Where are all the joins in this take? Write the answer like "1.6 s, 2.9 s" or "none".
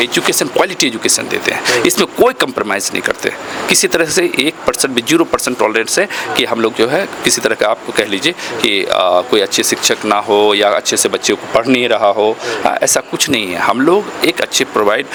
none